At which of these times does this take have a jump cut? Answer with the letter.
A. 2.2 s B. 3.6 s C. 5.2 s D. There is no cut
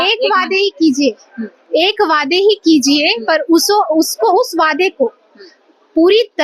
D